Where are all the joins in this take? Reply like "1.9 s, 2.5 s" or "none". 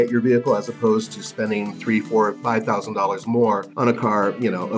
3.7 s